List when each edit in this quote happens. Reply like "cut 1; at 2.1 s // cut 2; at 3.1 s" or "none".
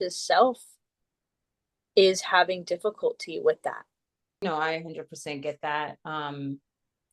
cut 1; at 4.4 s